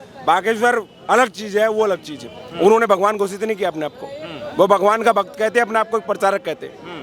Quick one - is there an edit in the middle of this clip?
no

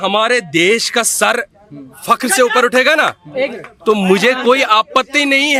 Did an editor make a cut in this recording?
no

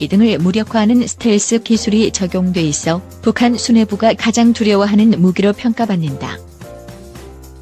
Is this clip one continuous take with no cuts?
yes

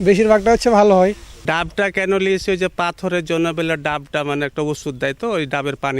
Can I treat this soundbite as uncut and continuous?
no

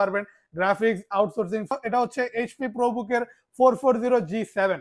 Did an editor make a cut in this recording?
yes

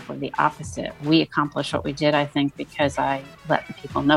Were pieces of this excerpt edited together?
no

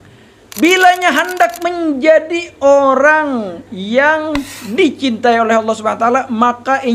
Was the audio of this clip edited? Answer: no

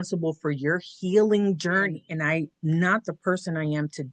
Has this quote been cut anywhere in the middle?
yes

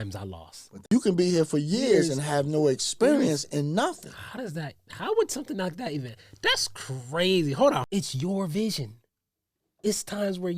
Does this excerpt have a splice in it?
yes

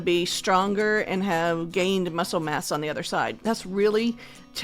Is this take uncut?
no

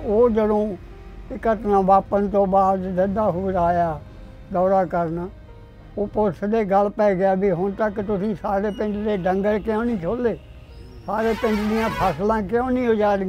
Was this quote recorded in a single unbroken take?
yes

